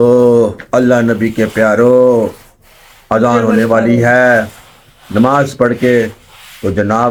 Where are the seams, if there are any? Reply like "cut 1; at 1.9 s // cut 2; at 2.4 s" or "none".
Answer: none